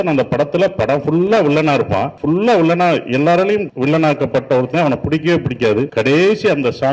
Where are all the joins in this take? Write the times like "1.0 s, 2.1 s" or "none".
2.1 s, 3.7 s, 5.9 s